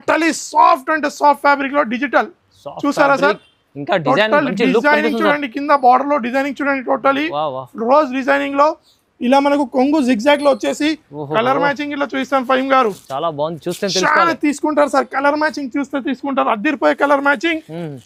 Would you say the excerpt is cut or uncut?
uncut